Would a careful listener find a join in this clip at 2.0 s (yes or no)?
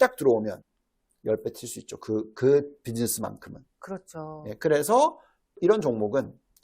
no